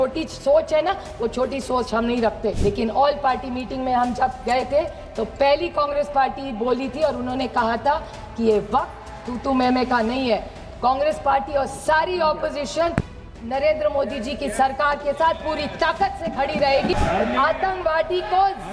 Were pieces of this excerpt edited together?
yes; 2 cuts; at 2.6 s, 16.9 s

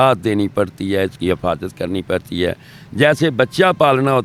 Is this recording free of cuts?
yes; 0 cuts

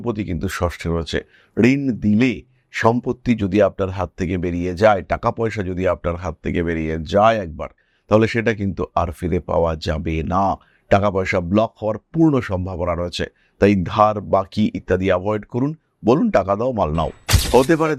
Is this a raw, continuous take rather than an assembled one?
yes; 0 cuts

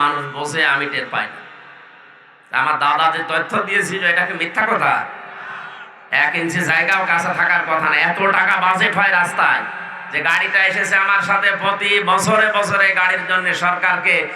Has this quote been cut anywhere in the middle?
no; 0 cuts

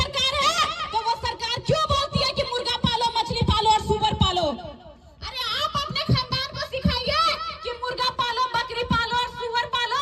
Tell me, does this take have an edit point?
no; 0 cuts

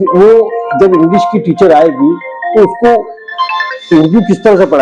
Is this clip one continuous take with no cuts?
yes; 0 cuts

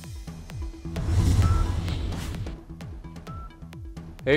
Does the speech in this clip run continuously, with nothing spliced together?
no; 1 cut; at 1.0 s

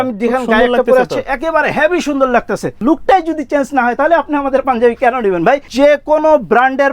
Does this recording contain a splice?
yes; 2 cuts; at 2.8 s, 5.7 s

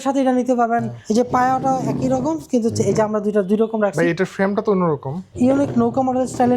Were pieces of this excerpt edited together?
yes; 2 cuts; at 1.0 s, 5.2 s

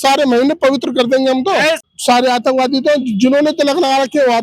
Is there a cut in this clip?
yes; 1 cut; at 1.9 s

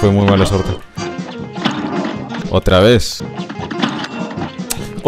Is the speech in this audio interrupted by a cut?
no; 0 cuts

